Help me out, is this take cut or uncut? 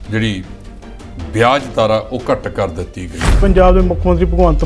cut